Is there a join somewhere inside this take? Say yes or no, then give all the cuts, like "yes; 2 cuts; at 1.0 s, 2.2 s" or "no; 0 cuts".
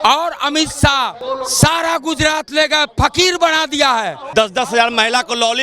yes; 2 cuts; at 1.2 s, 4.2 s